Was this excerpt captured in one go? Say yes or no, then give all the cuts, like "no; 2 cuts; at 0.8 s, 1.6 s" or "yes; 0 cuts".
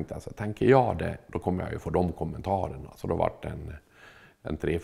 yes; 0 cuts